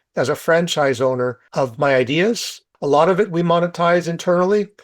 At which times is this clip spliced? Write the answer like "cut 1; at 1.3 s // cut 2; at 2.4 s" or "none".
cut 1; at 1.4 s // cut 2; at 2.7 s